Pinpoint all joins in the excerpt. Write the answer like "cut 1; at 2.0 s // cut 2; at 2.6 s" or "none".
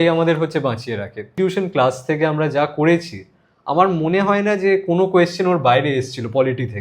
cut 1; at 1.4 s